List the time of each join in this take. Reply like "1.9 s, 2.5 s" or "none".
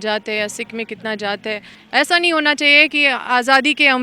1.7 s